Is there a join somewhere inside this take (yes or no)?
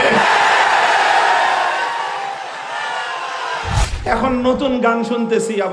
yes